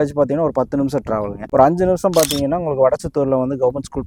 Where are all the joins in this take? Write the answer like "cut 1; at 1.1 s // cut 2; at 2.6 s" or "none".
none